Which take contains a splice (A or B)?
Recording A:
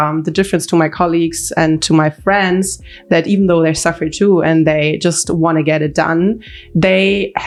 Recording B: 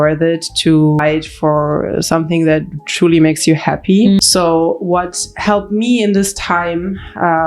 B